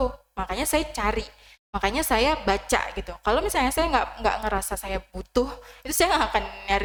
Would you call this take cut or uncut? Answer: uncut